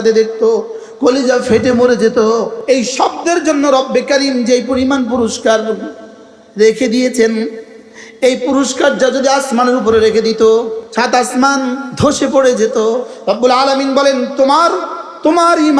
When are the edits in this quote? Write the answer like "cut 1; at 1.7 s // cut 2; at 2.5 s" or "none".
cut 1; at 2.6 s // cut 2; at 10.8 s // cut 3; at 11.9 s // cut 4; at 13.1 s